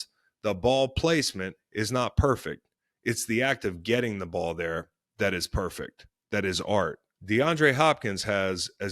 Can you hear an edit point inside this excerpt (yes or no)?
yes